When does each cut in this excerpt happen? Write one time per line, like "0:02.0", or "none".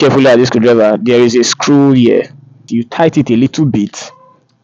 0:02.6